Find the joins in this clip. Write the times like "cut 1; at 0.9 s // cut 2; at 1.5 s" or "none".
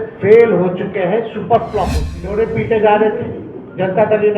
cut 1; at 2.3 s